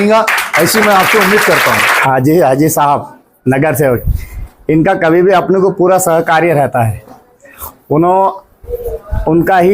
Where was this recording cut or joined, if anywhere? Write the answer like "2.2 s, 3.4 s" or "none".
2.0 s